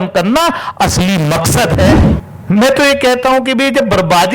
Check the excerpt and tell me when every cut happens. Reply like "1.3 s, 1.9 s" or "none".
2.1 s